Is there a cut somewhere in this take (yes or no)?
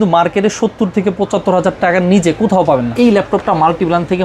yes